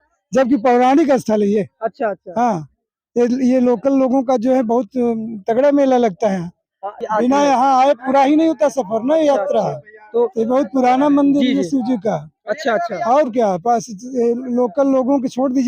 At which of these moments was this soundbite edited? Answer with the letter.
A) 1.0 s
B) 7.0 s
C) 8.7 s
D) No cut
B